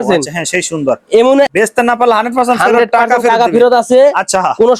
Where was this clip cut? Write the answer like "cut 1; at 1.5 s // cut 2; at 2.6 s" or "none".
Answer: cut 1; at 1.5 s